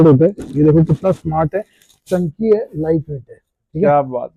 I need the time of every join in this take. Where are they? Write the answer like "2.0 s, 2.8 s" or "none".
none